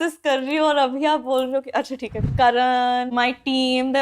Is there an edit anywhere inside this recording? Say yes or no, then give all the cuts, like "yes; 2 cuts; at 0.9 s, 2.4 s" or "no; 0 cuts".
yes; 2 cuts; at 2.2 s, 3.1 s